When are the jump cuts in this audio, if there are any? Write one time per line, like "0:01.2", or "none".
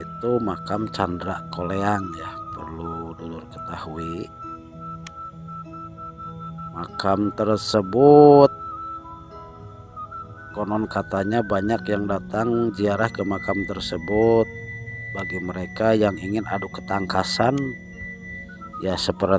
none